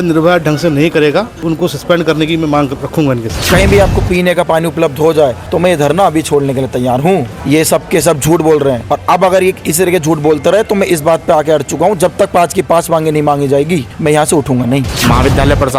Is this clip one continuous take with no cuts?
no; 7 cuts; at 1.5 s, 3.3 s, 5.4 s, 7.3 s, 8.9 s, 13.9 s, 14.9 s

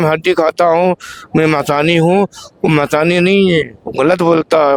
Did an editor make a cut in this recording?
no; 0 cuts

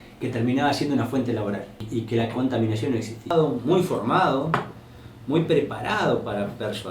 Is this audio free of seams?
no; 2 cuts; at 1.8 s, 3.3 s

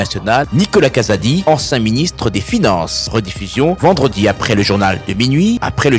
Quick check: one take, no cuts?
yes; 0 cuts

